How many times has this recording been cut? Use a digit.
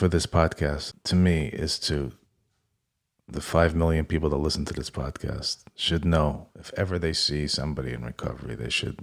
1